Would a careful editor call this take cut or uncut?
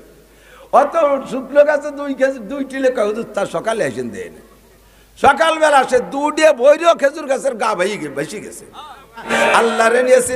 cut